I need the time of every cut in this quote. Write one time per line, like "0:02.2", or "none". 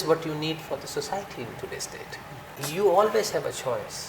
0:02.6